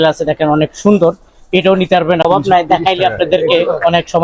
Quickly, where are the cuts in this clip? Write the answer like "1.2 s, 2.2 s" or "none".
2.3 s